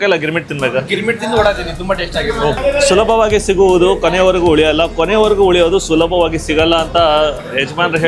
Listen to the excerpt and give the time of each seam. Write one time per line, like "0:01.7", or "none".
0:02.6